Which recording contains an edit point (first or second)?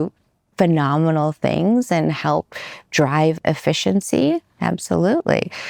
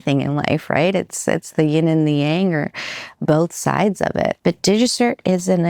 second